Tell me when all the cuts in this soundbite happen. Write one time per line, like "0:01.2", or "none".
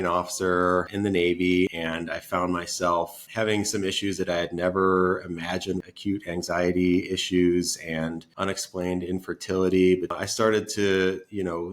0:00.9
0:01.7
0:03.2
0:05.9
0:08.3
0:10.1

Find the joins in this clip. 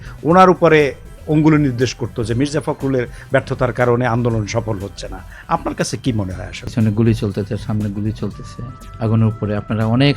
0:06.7

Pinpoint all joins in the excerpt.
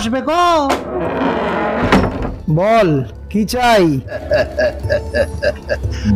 0:04.2

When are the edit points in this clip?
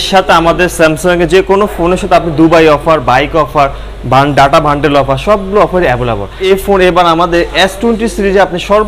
0:06.4

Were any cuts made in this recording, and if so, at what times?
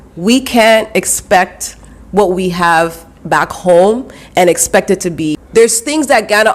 0:05.4

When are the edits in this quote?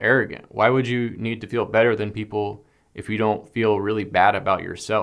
none

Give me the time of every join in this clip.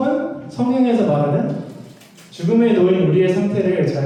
none

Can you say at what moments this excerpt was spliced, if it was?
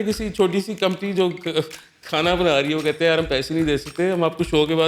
none

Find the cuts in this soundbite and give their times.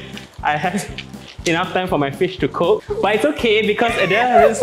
0:02.8

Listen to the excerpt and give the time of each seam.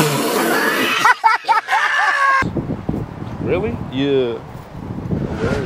0:02.4

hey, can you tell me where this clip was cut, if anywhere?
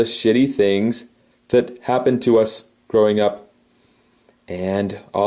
0:01.8

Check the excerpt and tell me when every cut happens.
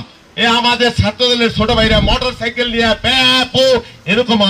none

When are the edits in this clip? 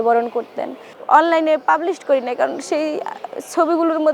0:01.0

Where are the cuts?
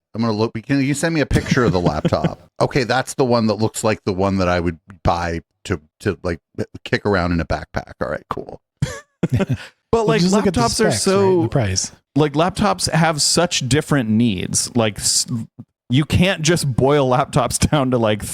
none

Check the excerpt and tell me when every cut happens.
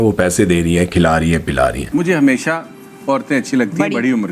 0:01.8

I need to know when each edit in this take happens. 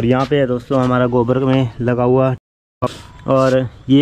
0:02.6

